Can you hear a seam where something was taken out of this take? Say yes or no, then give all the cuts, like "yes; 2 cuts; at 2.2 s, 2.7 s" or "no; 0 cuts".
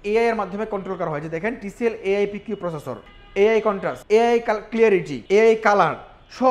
yes; 2 cuts; at 3.9 s, 5.1 s